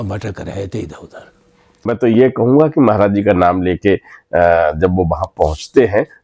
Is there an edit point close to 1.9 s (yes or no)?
yes